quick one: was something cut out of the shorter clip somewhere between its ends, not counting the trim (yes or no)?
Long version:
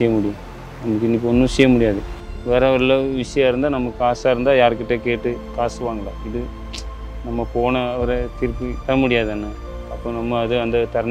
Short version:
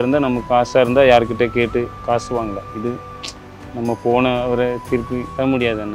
no